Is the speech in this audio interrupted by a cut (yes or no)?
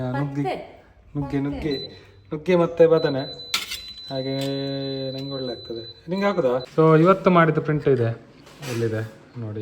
yes